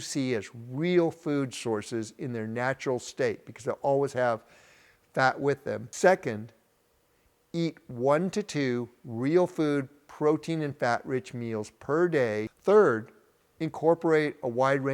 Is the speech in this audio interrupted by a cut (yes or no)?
yes